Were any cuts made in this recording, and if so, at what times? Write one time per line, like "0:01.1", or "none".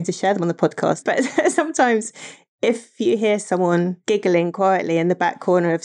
0:01.0
0:04.0